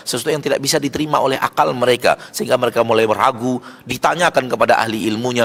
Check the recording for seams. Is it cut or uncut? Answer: uncut